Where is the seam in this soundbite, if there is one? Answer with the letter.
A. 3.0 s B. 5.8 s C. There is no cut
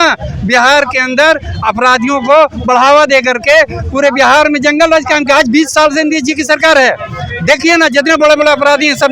C